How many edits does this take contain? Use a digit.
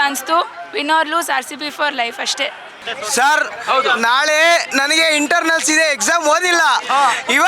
1